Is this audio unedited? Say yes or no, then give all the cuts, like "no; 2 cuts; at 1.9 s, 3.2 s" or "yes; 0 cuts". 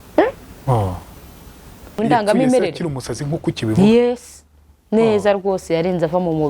no; 1 cut; at 2.0 s